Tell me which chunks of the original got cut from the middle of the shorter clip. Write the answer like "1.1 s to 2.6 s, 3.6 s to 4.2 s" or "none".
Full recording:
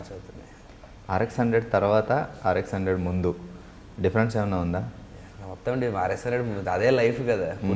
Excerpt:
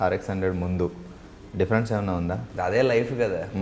4.9 s to 6.6 s

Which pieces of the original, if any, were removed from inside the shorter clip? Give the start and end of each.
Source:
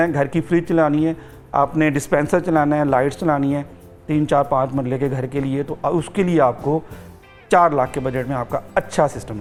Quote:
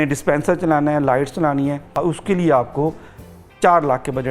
3.7 s to 5.7 s

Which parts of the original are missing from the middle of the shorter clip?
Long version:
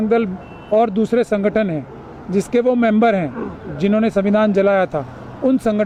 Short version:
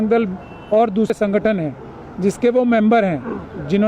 1.1 s to 1.2 s

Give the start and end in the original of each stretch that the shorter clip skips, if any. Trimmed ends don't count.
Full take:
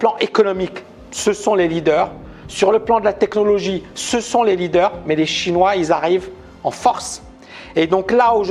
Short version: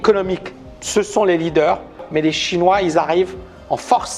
2.4 s to 5.0 s

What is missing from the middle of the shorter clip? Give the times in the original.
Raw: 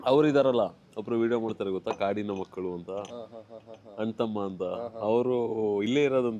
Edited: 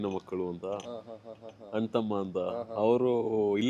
none

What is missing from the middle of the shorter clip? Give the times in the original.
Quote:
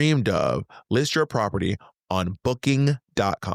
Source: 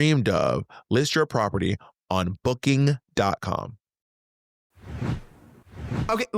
none

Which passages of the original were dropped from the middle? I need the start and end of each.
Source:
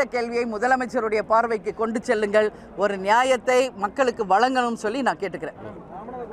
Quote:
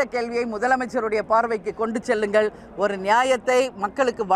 none

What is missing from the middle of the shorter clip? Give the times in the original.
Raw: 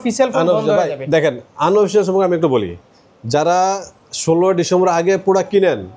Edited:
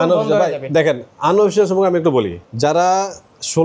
2.8 s to 3.1 s

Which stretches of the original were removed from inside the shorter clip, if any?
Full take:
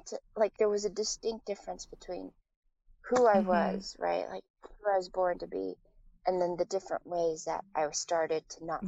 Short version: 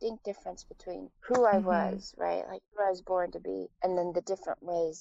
2.3 s to 2.9 s, 4.4 s to 4.7 s, 5.8 s to 6.1 s

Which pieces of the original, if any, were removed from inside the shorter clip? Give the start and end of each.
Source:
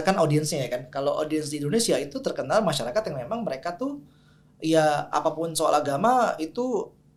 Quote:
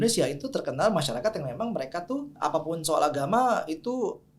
4.1 s to 5.1 s

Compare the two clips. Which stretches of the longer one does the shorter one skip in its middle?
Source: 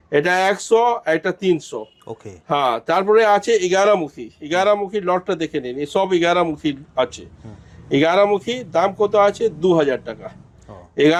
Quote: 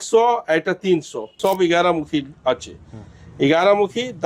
1.9 s to 5.8 s

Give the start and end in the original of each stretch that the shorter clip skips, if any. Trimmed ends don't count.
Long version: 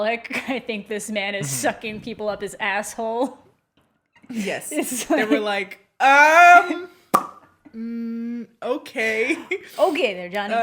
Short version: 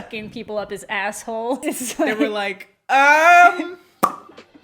3.3 s to 4.7 s

